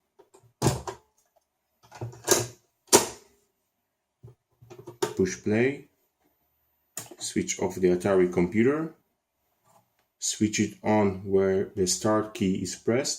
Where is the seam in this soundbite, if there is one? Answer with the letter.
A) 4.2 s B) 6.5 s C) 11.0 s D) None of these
A